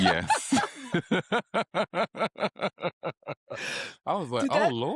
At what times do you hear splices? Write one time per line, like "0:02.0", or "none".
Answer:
none